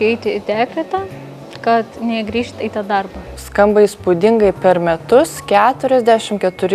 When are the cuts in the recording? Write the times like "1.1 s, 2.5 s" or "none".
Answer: 2.5 s, 3.4 s